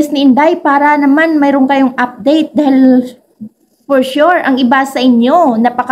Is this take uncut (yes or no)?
yes